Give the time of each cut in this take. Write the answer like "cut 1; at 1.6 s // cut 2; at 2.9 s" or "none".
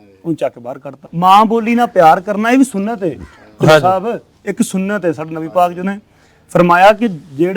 cut 1; at 1.0 s